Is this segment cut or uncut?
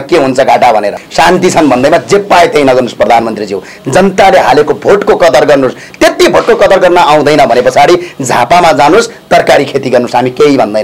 cut